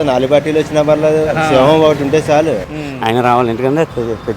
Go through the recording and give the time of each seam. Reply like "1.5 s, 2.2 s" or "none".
2.6 s